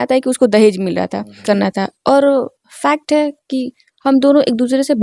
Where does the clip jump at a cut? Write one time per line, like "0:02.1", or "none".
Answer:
0:01.4